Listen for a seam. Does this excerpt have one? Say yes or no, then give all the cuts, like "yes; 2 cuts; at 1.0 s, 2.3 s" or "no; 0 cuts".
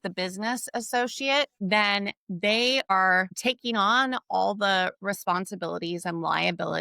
yes; 2 cuts; at 1.5 s, 2.9 s